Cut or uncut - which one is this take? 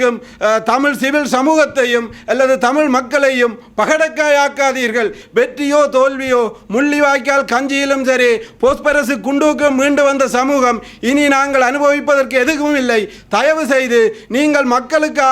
cut